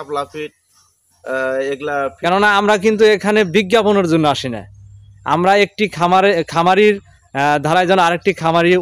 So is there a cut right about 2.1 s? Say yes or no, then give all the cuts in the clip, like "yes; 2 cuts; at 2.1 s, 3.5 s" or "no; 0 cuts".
yes; 1 cut; at 2.1 s